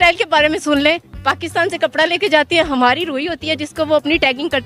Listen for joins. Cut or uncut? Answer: uncut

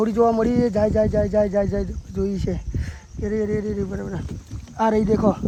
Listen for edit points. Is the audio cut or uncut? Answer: uncut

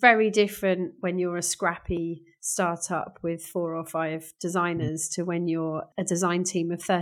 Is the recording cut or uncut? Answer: cut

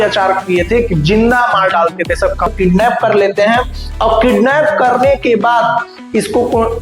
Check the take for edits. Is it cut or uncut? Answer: cut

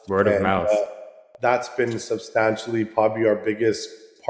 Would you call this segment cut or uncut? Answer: uncut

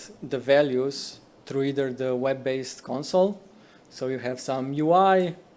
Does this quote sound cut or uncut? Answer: uncut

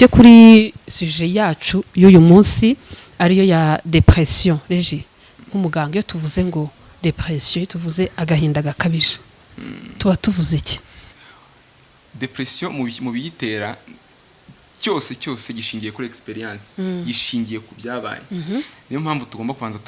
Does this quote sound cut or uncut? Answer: cut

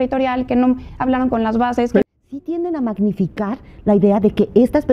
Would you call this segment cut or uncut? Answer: cut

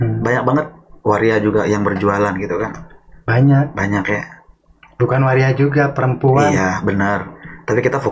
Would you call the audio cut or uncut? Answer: uncut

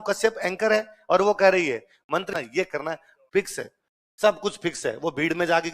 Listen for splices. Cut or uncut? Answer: cut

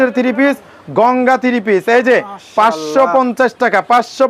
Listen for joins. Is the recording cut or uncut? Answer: uncut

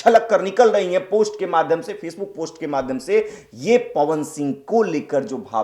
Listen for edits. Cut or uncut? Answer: uncut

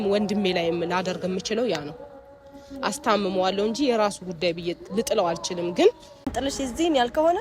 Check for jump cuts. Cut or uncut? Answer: cut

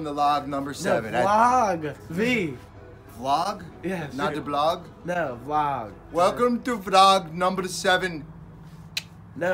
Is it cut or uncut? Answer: uncut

